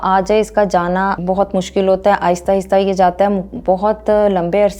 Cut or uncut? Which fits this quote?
cut